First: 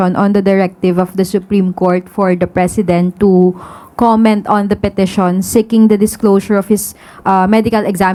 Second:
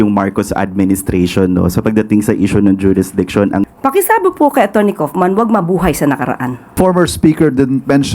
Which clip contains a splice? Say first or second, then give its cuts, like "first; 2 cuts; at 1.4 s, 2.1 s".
second; 2 cuts; at 3.7 s, 6.7 s